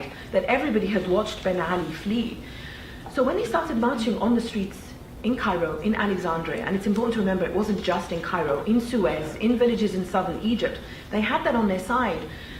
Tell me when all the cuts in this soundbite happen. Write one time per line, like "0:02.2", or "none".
0:09.1